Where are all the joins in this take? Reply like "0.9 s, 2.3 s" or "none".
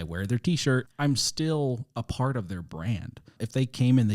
0.9 s, 3.2 s